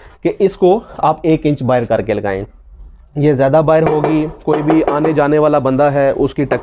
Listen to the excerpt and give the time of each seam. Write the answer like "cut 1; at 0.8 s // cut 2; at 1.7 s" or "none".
none